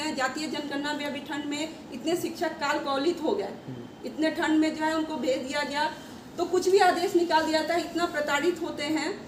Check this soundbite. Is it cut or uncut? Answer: uncut